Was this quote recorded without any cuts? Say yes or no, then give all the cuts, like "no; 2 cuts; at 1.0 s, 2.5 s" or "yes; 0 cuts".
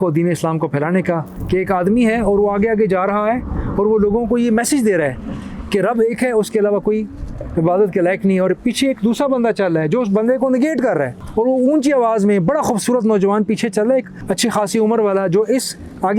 no; 2 cuts; at 1.3 s, 11.2 s